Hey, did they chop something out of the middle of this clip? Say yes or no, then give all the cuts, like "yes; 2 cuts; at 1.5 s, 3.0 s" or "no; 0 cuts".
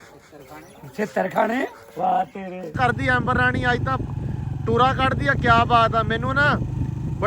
yes; 1 cut; at 2.7 s